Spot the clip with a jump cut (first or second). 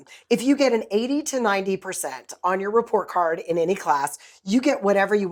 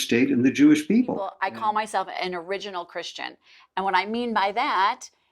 second